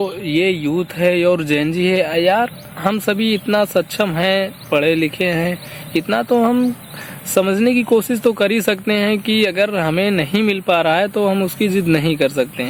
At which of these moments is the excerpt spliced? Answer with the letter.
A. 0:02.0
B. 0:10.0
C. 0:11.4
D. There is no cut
D